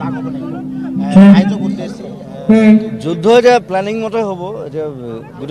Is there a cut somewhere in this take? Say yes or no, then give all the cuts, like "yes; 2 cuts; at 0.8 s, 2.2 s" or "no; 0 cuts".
no; 0 cuts